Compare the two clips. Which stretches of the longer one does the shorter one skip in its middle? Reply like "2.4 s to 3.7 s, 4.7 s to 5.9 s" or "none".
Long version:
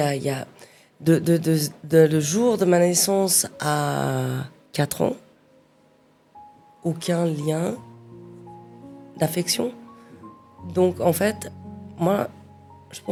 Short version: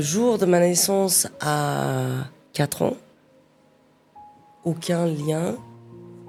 none